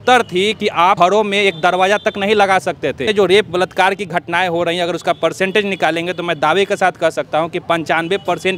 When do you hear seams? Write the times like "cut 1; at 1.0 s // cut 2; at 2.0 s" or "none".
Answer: cut 1; at 1.0 s // cut 2; at 3.0 s